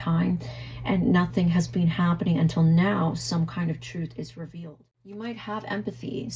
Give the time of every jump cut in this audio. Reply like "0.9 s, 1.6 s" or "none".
4.5 s